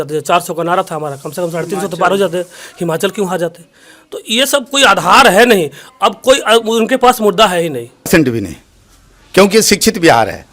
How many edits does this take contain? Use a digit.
1